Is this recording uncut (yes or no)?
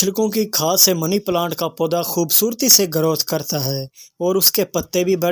yes